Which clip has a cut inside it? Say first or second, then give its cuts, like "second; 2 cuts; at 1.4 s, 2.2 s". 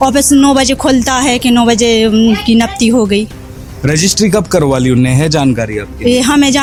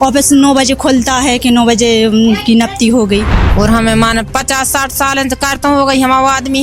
second; 1 cut; at 3.4 s